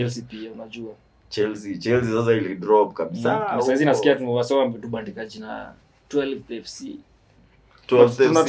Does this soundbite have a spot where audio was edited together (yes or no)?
no